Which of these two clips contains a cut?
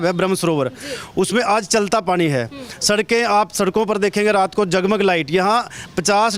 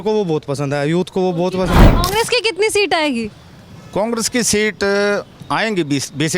second; 1 cut; at 1.9 s

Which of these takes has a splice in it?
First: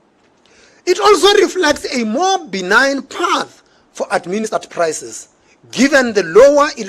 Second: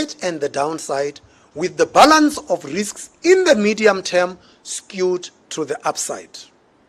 first; 1 cut; at 4.5 s

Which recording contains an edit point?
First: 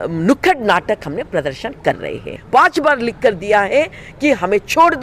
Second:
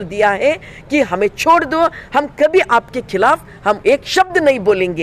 first; 1 cut; at 2.4 s

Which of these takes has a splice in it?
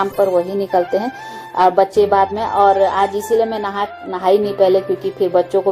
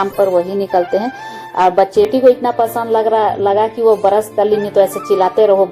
second; 1 cut; at 2.1 s

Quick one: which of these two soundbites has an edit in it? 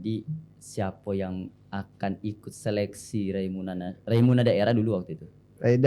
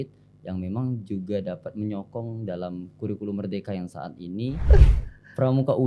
second; 1 cut; at 4.7 s

